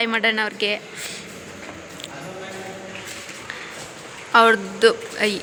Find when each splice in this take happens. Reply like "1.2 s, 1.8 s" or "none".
none